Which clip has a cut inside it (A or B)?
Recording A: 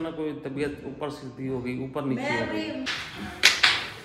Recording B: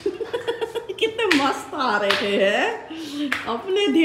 A